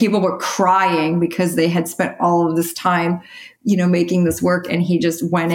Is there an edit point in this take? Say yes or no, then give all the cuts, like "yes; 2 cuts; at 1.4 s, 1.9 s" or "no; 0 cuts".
no; 0 cuts